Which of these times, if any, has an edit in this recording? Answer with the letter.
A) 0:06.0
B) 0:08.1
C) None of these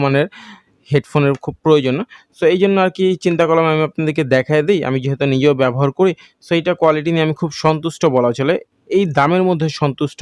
C